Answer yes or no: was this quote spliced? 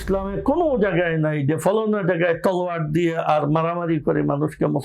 no